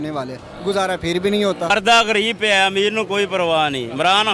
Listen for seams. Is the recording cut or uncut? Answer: cut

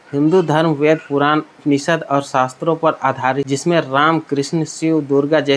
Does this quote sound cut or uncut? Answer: cut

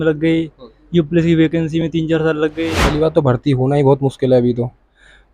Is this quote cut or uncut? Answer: cut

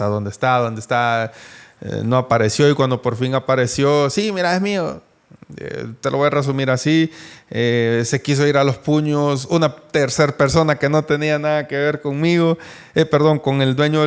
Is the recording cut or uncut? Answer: uncut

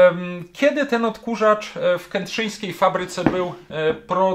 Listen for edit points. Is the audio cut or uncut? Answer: uncut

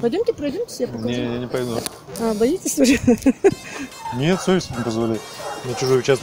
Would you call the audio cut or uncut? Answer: uncut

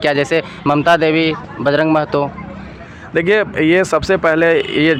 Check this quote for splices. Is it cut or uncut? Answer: uncut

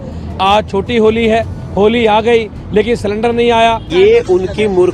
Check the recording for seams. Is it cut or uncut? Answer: cut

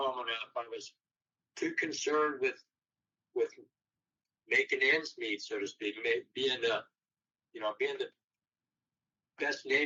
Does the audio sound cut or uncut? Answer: uncut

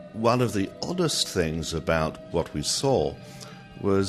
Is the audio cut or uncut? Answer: cut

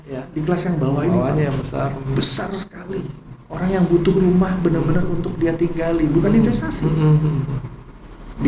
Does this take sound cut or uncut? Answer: uncut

